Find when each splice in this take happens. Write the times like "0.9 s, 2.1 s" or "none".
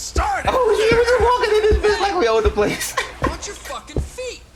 none